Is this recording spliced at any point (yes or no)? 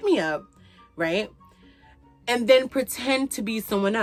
no